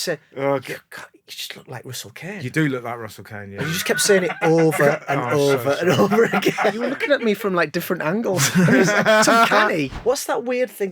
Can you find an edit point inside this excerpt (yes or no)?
yes